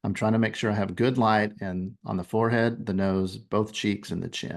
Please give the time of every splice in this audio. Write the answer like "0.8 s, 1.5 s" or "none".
none